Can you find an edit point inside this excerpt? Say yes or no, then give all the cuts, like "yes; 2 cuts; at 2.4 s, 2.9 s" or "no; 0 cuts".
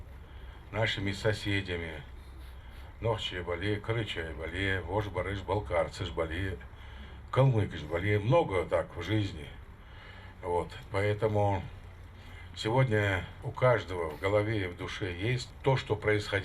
yes; 2 cuts; at 13.4 s, 15.5 s